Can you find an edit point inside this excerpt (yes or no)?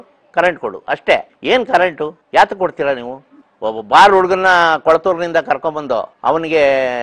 yes